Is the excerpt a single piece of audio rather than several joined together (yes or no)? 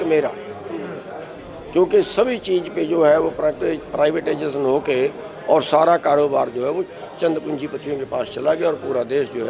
yes